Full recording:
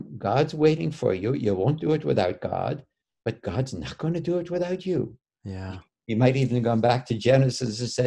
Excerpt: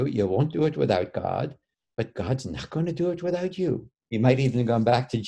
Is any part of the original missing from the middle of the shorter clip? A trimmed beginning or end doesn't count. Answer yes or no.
yes